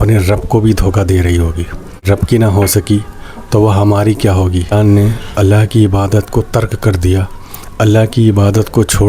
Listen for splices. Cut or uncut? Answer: cut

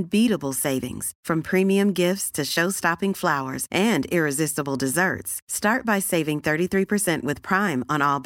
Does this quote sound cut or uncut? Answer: uncut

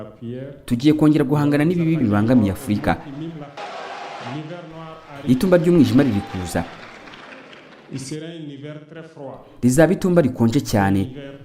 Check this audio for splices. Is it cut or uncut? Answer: cut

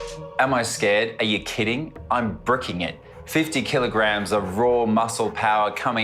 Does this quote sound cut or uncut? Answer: uncut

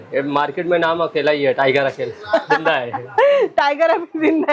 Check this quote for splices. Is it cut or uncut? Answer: uncut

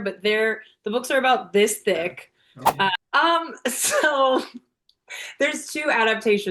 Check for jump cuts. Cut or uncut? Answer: cut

